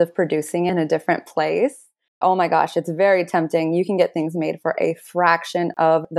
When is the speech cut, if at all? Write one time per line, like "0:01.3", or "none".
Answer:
0:00.7
0:02.2